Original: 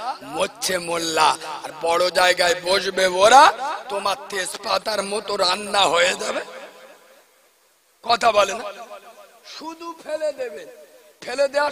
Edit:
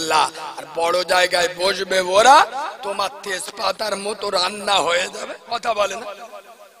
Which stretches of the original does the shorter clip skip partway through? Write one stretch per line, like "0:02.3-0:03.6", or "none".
0:06.4-0:07.9